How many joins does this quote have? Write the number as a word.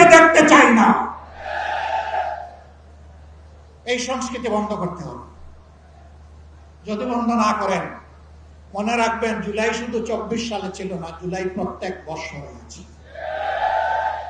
zero